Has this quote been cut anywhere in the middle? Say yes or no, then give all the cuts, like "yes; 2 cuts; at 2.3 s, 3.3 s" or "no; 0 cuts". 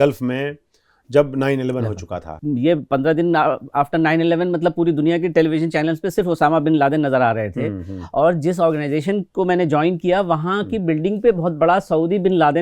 yes; 1 cut; at 2.4 s